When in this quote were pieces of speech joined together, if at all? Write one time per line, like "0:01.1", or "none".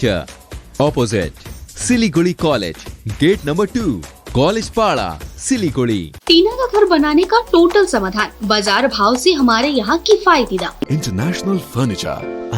0:06.1
0:10.9